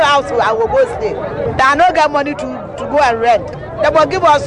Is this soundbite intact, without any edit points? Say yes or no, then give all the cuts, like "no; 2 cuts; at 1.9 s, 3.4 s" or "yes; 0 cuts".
no; 1 cut; at 3.6 s